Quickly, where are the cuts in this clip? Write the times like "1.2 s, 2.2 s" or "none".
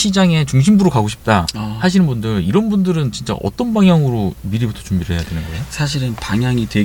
none